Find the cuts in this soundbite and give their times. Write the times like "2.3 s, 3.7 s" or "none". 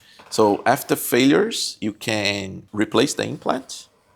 2.6 s